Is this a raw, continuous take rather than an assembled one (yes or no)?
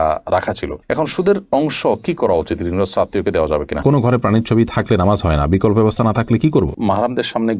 no